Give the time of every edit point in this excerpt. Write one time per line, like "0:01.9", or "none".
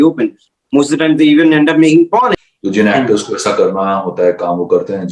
0:02.3